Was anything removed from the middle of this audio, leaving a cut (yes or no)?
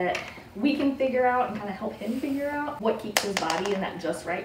yes